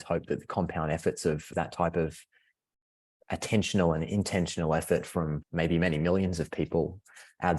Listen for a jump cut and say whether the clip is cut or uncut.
uncut